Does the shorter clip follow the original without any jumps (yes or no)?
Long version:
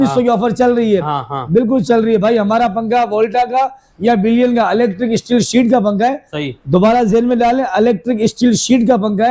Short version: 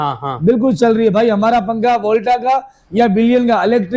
yes